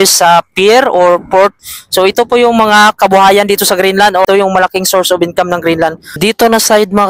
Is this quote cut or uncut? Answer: cut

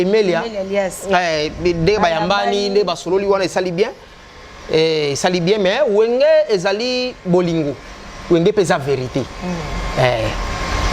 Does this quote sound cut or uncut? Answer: uncut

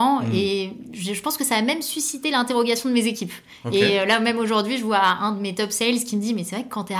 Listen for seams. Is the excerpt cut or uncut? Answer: uncut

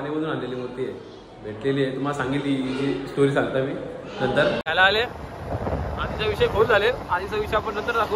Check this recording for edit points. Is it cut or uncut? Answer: cut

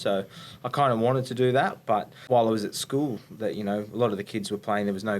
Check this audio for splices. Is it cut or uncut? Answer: cut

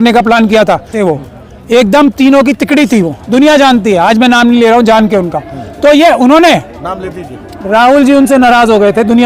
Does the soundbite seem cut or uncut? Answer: cut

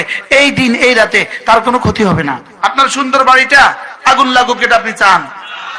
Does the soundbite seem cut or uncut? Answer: cut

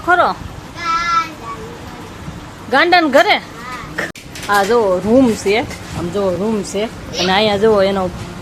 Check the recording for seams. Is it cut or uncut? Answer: cut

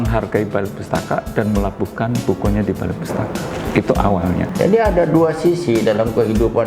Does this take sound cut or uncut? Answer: cut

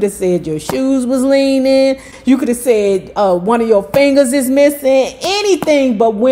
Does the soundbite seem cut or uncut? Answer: cut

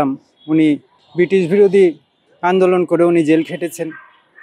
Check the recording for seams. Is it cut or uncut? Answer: cut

